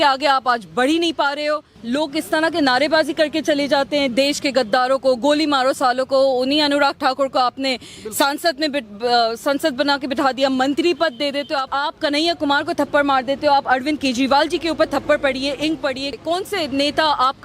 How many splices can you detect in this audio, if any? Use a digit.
3